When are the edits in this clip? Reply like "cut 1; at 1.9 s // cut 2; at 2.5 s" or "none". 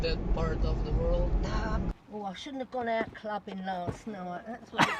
cut 1; at 1.9 s